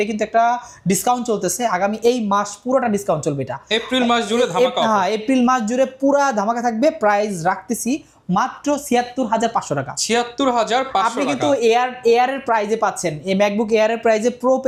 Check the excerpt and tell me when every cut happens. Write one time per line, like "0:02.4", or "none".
none